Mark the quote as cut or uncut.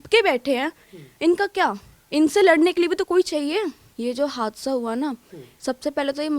cut